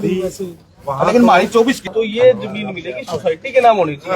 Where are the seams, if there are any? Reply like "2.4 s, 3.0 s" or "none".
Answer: 1.9 s